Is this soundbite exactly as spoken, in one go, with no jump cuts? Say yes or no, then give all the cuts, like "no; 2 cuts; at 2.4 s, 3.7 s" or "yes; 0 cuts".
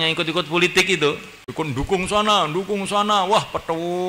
no; 1 cut; at 1.4 s